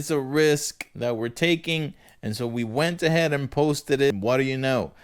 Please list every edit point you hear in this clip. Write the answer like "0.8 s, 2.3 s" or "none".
4.1 s